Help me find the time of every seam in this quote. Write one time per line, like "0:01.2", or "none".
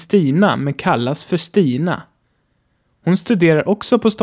0:02.2